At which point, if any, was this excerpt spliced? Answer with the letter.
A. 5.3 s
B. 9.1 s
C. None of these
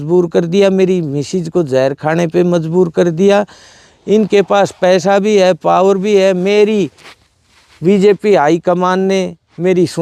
C